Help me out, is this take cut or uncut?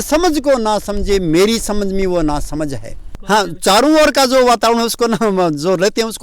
cut